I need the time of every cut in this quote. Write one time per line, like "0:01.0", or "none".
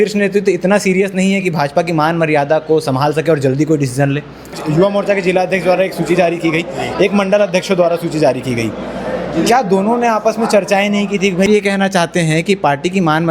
0:04.6
0:11.5